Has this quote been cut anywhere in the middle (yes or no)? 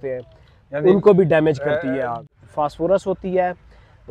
yes